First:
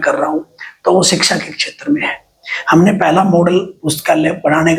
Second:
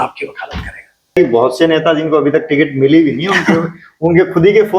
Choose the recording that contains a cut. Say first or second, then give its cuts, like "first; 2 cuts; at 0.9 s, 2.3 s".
second; 1 cut; at 1.1 s